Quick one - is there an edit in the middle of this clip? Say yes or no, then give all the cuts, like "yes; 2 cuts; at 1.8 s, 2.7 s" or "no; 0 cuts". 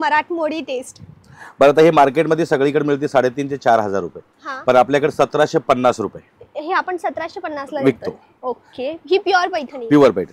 no; 0 cuts